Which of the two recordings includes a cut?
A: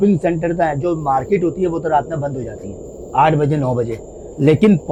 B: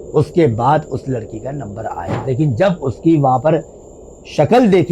B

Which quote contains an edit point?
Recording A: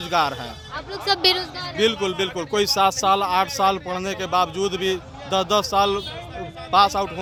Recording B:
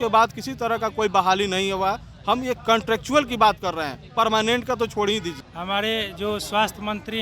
B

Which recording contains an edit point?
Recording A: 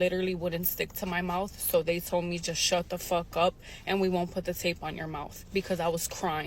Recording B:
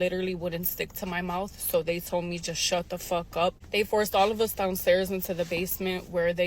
B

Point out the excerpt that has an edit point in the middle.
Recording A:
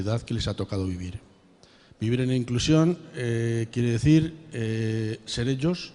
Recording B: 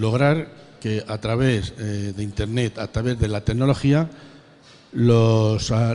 A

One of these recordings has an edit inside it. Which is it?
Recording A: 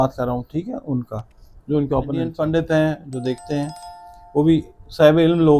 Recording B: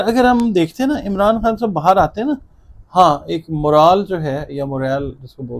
A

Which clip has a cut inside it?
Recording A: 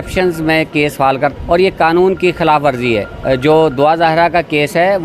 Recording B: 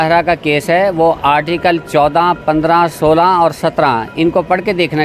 A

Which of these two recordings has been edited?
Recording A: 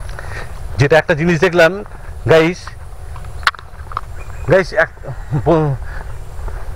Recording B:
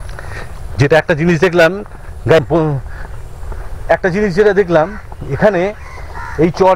B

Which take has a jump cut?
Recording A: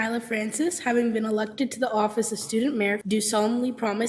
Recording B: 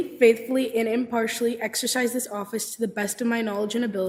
A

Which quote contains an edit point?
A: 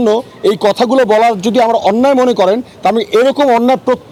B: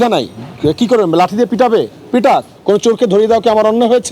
B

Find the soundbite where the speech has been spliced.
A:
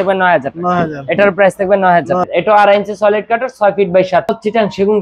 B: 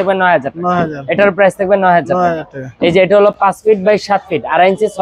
A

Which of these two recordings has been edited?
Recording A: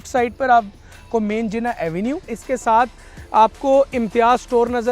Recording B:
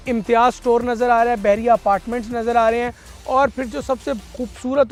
A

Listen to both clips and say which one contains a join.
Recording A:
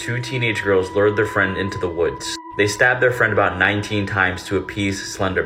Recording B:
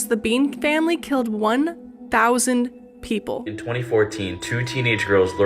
B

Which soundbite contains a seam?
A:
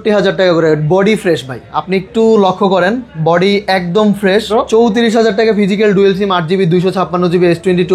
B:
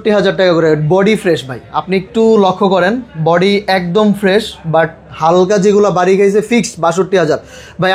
A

